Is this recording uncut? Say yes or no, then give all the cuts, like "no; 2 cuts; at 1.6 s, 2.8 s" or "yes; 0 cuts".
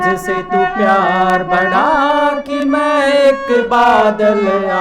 yes; 0 cuts